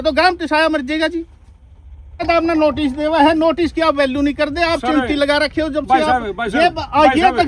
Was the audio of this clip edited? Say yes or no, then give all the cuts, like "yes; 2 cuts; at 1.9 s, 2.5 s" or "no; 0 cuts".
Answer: yes; 1 cut; at 2.2 s